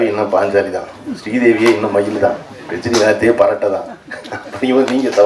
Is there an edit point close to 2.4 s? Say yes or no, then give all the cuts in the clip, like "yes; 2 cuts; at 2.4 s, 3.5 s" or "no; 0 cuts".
no; 0 cuts